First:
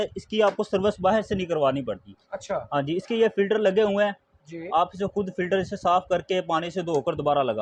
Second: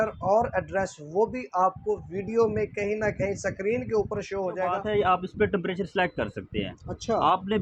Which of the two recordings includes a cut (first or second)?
second